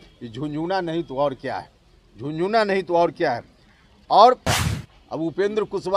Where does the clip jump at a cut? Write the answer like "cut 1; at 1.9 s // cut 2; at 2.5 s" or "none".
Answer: cut 1; at 4.6 s